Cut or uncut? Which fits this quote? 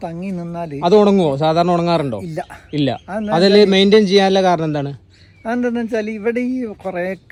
uncut